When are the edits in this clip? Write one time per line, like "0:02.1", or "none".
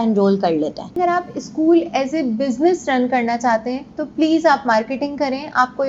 0:01.0